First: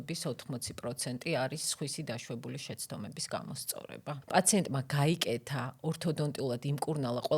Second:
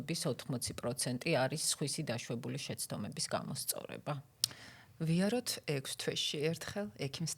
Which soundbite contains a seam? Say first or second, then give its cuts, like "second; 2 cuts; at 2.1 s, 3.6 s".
first; 1 cut; at 4.2 s